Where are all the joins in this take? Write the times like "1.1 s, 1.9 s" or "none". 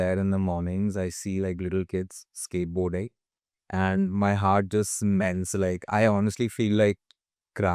none